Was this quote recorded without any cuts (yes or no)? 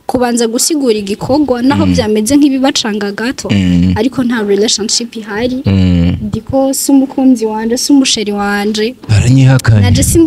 yes